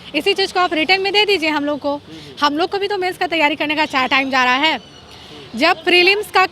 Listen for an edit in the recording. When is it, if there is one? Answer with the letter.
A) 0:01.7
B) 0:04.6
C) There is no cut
C